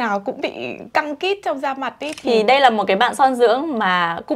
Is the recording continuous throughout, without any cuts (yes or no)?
no